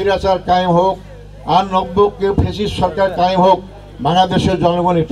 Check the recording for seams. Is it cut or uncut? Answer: uncut